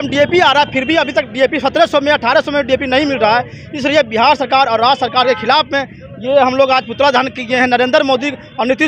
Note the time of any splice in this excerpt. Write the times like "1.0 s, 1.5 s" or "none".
none